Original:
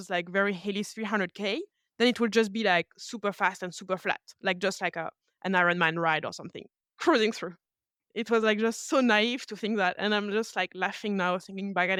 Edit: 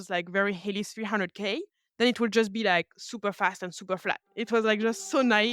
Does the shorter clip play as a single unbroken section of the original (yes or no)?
no